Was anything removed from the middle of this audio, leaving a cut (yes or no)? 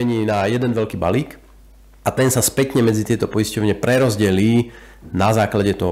yes